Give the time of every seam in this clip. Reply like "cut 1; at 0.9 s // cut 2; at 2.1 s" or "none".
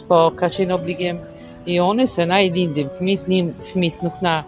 none